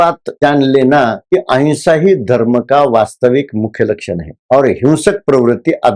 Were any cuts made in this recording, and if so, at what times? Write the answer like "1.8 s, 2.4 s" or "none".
1.2 s